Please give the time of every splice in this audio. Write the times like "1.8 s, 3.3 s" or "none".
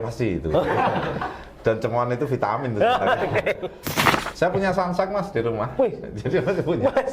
4.1 s